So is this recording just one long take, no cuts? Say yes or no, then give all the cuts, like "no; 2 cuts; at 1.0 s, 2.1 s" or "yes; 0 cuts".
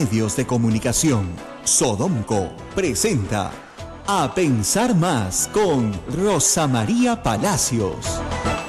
yes; 0 cuts